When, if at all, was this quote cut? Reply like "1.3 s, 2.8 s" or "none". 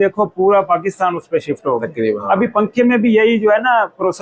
2.2 s